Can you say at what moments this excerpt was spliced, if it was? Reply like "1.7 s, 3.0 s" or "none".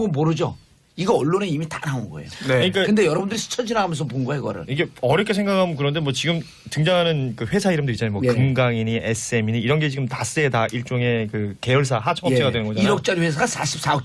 5.2 s

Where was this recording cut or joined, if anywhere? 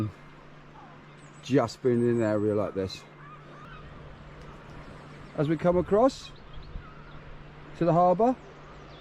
3.5 s

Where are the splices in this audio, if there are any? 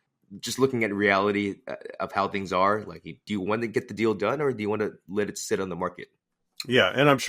3.2 s

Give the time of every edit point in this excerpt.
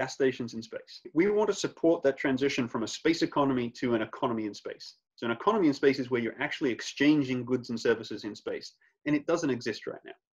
1.1 s

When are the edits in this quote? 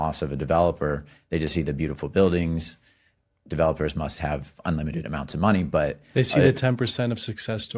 none

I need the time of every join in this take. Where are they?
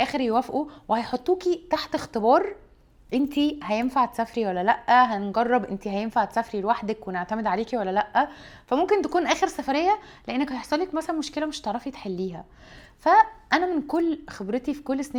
none

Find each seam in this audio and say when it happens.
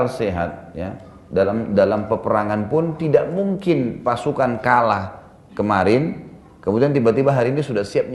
none

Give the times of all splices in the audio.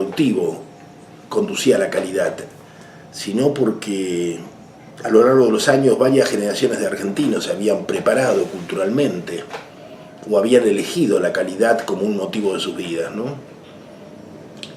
1.5 s

